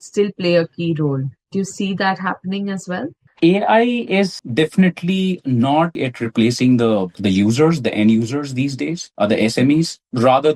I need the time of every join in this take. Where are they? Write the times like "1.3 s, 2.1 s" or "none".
none